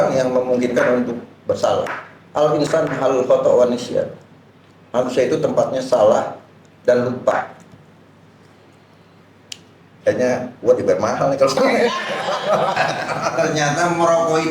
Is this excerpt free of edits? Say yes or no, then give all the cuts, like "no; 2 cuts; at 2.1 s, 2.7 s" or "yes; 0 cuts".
no; 1 cut; at 13.3 s